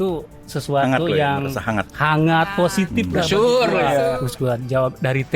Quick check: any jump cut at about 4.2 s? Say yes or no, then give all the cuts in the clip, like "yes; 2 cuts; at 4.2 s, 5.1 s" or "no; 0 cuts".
yes; 1 cut; at 4.2 s